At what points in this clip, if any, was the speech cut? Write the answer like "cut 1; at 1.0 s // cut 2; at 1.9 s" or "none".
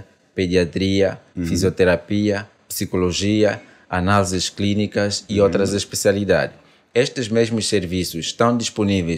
none